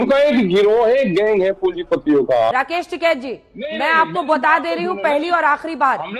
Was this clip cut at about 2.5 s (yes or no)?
yes